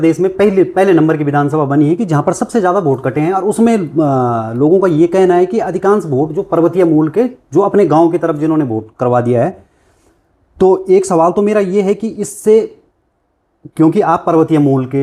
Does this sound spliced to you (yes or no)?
no